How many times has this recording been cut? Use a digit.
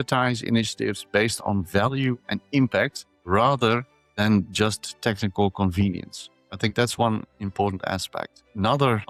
0